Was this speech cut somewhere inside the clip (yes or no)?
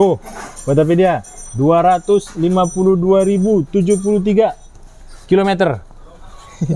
no